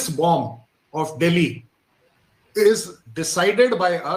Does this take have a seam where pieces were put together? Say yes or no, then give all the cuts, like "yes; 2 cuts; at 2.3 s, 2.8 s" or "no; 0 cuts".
no; 0 cuts